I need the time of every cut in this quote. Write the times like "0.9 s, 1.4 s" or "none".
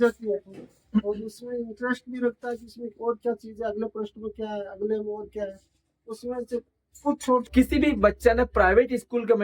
7.4 s